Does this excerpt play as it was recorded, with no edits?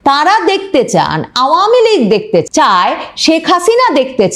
no; 1 cut; at 2.5 s

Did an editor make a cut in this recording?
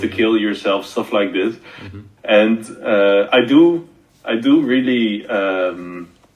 no; 0 cuts

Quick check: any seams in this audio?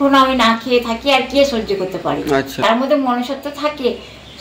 yes; 1 cut; at 2.6 s

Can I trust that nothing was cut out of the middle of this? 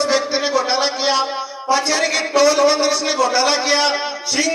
yes; 0 cuts

